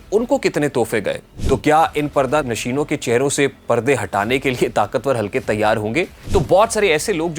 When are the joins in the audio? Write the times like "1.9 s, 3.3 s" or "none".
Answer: 1.3 s, 2.4 s, 6.2 s

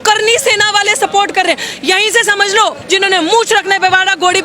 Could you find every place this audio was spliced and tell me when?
2.8 s

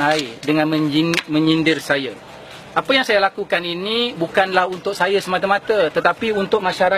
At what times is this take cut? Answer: 1.3 s

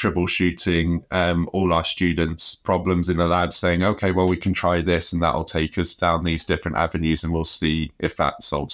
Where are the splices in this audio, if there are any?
none

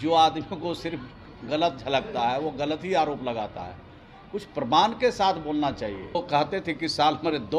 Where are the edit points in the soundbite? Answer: 6.1 s

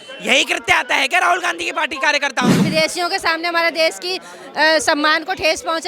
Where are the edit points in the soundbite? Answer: 2.6 s

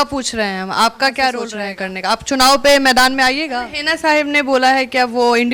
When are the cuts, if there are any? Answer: 1.5 s, 3.4 s

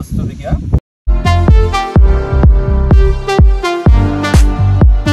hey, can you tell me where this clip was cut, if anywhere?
1.1 s

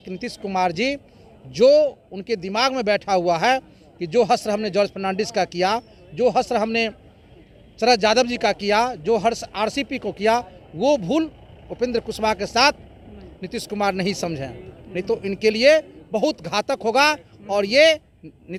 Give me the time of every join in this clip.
none

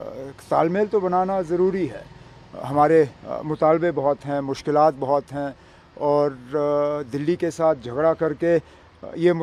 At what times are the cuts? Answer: none

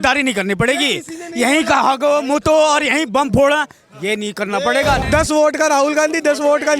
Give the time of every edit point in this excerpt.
5.0 s

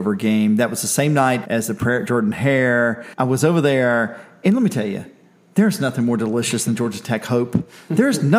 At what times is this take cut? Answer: 1.4 s, 3.0 s

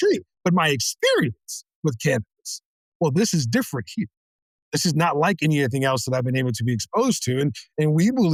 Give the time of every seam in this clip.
none

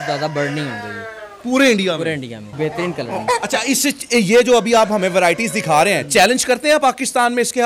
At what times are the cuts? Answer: 2.4 s

